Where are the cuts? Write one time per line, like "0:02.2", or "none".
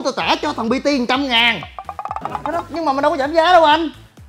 0:02.4

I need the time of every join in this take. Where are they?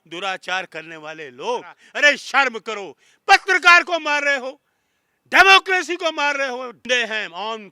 0:01.8
0:06.8

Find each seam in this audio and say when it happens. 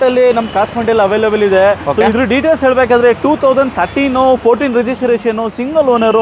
none

